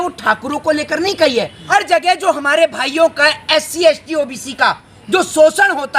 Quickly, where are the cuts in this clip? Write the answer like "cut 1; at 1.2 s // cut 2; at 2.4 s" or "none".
cut 1; at 1.6 s